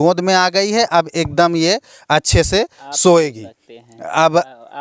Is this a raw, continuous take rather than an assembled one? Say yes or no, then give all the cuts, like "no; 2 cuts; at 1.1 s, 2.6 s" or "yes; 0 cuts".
yes; 0 cuts